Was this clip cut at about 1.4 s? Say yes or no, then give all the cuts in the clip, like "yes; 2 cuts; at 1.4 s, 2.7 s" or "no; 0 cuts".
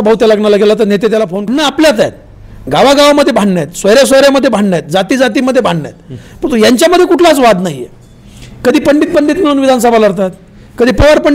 yes; 1 cut; at 1.4 s